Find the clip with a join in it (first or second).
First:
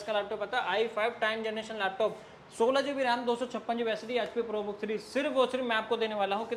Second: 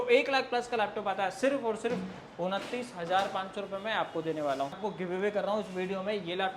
second